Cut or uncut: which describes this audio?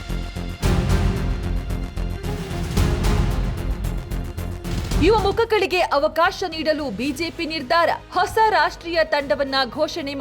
cut